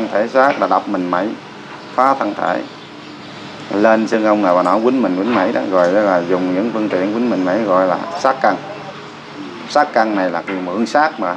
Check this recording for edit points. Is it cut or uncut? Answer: uncut